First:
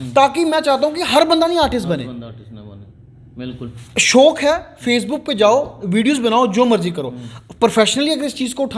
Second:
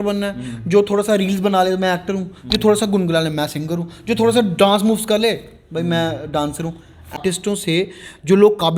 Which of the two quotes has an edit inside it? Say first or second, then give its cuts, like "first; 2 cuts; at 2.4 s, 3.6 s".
second; 1 cut; at 7.2 s